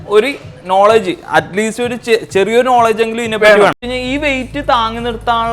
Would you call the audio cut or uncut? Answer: cut